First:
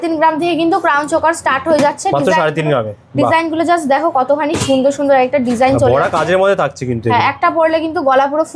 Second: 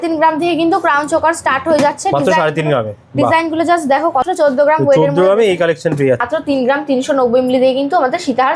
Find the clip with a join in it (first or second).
second